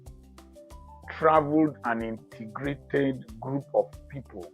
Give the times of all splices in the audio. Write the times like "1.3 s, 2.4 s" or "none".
1.1 s